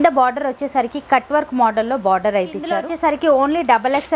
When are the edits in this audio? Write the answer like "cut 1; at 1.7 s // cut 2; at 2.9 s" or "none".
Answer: cut 1; at 2.9 s